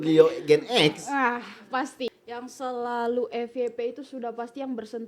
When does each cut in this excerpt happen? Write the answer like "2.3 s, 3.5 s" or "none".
2.1 s

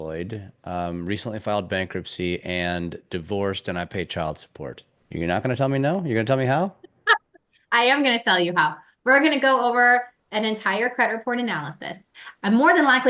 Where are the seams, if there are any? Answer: 4.9 s

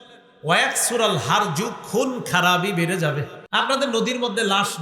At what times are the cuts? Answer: 3.4 s

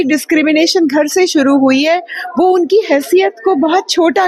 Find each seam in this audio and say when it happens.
none

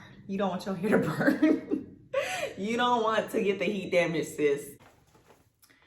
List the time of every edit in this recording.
4.7 s

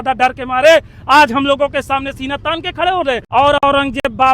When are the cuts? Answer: 3.2 s

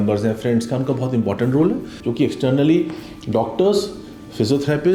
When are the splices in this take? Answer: 2.0 s

